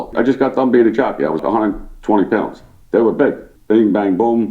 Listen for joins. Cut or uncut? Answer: cut